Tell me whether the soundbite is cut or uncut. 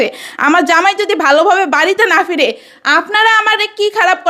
uncut